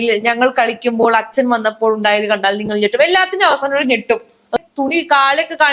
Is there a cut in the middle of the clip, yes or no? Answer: yes